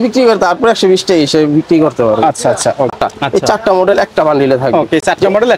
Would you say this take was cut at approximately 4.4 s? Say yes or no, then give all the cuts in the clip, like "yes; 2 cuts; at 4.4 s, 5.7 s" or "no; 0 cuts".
no; 1 cut; at 2.9 s